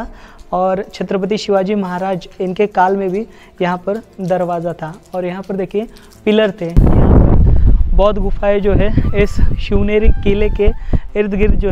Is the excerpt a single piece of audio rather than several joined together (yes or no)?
no